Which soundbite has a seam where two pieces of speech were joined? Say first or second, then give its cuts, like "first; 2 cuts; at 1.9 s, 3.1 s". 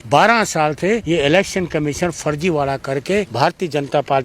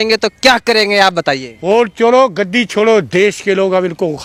first; 2 cuts; at 1.0 s, 3.3 s